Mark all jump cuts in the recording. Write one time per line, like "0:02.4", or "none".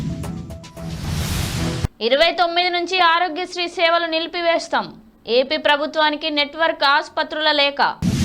0:01.6